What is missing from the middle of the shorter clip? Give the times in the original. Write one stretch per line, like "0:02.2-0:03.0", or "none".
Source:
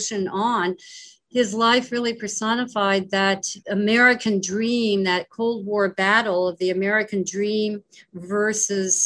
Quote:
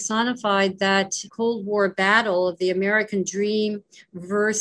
0:03.6-0:05.3